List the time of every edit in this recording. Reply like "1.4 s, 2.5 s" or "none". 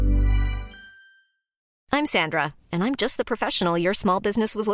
1.7 s